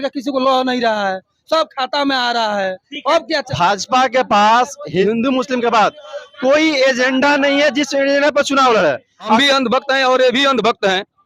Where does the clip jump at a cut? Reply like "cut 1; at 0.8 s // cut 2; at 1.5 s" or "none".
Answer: cut 1; at 3.3 s // cut 2; at 5.0 s // cut 3; at 9.4 s